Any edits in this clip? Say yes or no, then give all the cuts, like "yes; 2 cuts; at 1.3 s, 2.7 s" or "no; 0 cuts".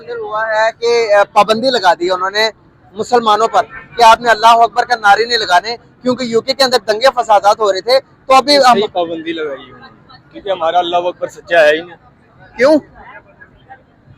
no; 0 cuts